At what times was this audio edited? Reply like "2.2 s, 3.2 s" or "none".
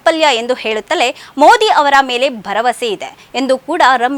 none